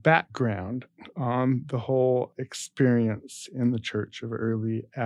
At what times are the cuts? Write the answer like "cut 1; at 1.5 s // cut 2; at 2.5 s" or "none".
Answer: none